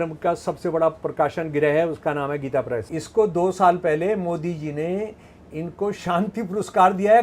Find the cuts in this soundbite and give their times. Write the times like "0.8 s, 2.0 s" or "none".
2.9 s